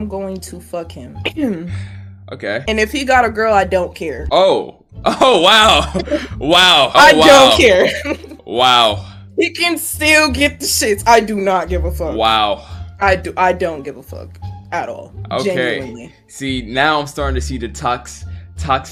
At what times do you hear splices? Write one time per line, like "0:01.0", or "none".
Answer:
none